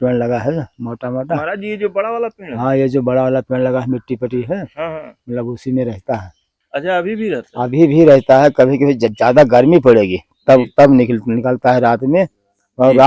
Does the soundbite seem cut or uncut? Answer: uncut